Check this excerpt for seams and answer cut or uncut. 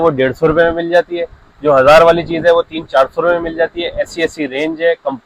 uncut